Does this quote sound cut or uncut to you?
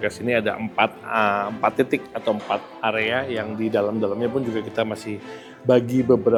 uncut